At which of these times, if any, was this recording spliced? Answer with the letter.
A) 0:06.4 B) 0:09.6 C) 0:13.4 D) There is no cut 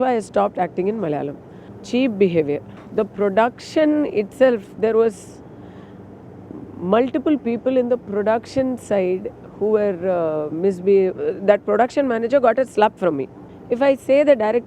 B